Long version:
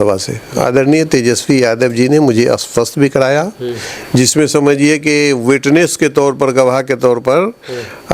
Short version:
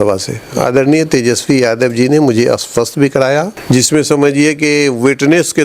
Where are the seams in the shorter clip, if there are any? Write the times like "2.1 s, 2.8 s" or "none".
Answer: 3.6 s